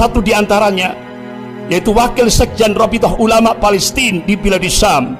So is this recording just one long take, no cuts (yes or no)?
yes